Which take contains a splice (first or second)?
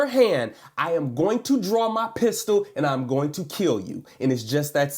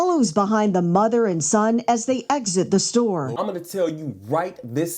second